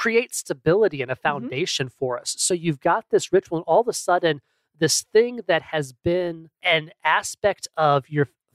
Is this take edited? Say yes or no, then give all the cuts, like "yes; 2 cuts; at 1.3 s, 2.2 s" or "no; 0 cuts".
yes; 1 cut; at 6.5 s